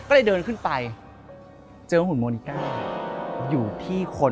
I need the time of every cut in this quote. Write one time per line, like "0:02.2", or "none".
none